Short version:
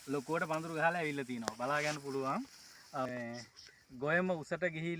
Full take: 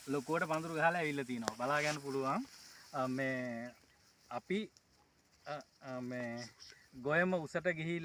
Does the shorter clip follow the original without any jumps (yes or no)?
no